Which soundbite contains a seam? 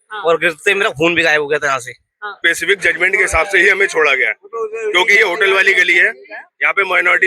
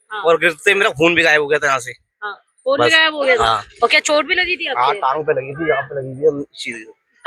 first; 1 cut; at 2.4 s

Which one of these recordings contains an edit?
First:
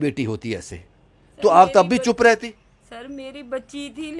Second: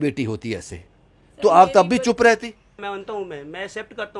second; 1 cut; at 2.8 s

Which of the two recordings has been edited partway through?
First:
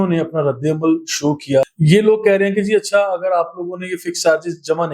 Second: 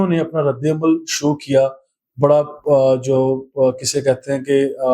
first; 1 cut; at 1.7 s

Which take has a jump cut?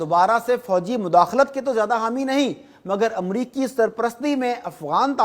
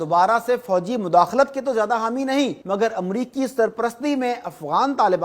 second; 1 cut; at 2.6 s

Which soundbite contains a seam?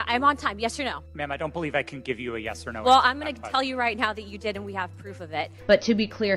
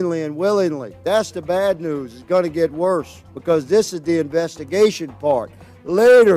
first; 2 cuts; at 1.1 s, 5.5 s

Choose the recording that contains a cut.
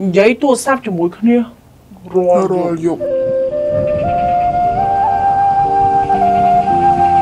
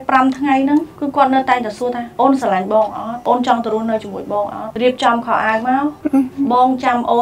second; 5 cuts; at 0.9 s, 2.1 s, 3.1 s, 4.6 s, 6.0 s

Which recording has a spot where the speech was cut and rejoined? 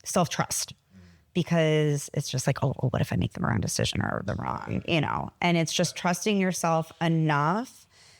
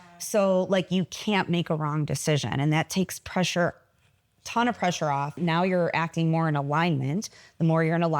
second; 1 cut; at 5.4 s

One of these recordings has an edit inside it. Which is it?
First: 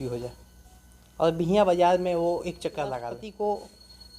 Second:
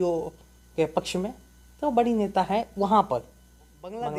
first; 1 cut; at 3.2 s

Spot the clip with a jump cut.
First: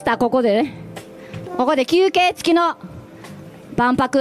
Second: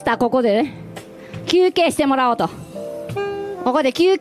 first; 1 cut; at 1.4 s

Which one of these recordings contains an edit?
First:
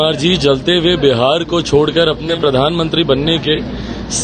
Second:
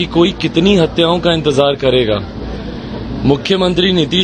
first; 1 cut; at 2.3 s

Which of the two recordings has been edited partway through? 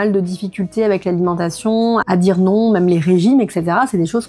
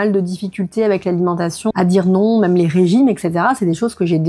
second; 1 cut; at 1.7 s

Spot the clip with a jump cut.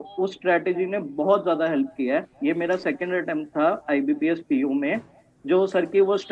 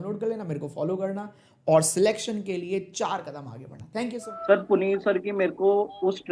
second; 1 cut; at 4.3 s

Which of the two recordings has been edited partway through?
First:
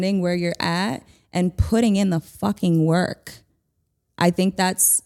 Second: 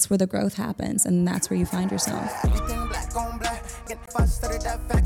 second; 1 cut; at 2.3 s

